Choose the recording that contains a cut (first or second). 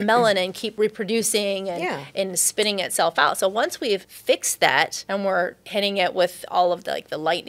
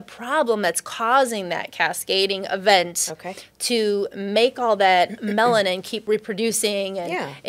first